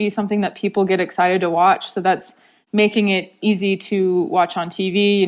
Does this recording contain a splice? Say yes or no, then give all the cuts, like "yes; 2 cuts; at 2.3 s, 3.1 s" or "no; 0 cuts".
yes; 1 cut; at 3.3 s